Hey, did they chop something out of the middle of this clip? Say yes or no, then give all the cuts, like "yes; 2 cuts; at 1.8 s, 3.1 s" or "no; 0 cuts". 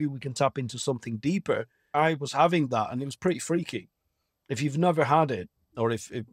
yes; 1 cut; at 1.9 s